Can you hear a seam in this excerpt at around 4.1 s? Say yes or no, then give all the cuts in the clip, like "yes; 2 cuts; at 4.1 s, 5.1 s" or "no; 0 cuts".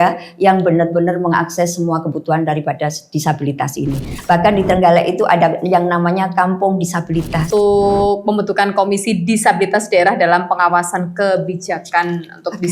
yes; 2 cuts; at 4.1 s, 7.5 s